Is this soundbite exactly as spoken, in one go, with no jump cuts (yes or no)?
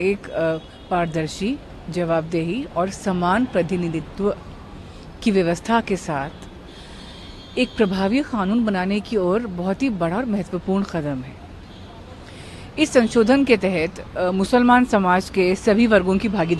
yes